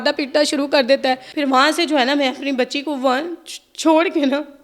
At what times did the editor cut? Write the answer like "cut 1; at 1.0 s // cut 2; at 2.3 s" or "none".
cut 1; at 1.3 s

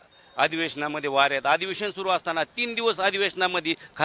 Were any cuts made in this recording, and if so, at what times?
none

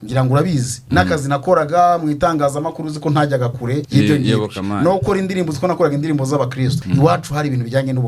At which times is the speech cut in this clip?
cut 1; at 3.9 s // cut 2; at 6.8 s

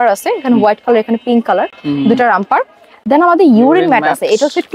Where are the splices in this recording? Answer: none

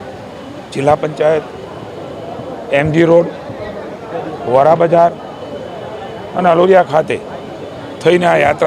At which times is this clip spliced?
none

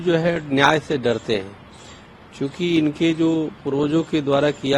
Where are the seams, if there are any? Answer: none

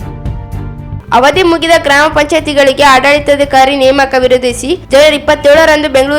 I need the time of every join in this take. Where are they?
none

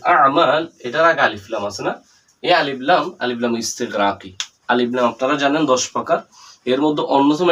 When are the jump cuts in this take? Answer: none

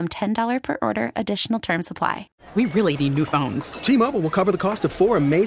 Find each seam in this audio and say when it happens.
cut 1; at 2.3 s

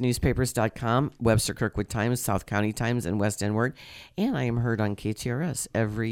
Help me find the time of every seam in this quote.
none

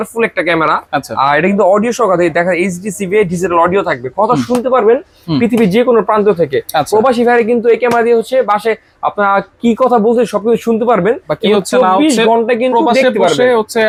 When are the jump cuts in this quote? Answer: none

